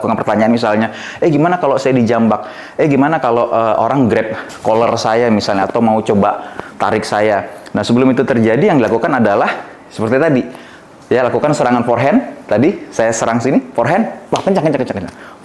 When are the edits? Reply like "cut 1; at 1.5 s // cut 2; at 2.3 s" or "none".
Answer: none